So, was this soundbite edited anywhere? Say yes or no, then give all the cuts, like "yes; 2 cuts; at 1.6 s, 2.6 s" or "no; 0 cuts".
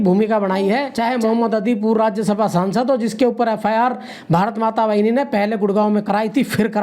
yes; 1 cut; at 0.9 s